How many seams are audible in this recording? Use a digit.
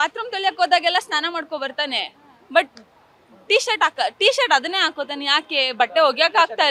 0